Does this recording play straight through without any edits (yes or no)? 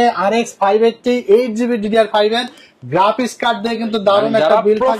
yes